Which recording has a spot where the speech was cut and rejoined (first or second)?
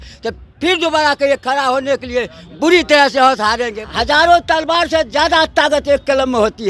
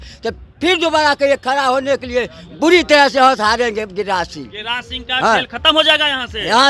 first